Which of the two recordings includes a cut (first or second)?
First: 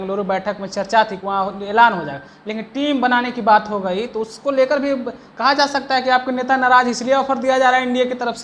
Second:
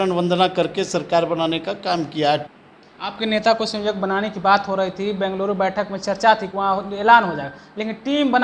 second